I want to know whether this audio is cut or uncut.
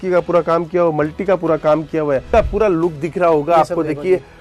cut